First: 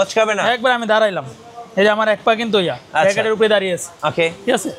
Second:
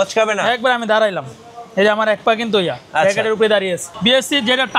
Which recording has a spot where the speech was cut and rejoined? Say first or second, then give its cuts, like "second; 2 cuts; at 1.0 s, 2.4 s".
second; 1 cut; at 3.9 s